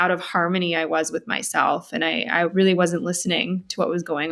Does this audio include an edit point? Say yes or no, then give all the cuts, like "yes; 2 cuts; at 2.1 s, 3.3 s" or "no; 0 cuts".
no; 0 cuts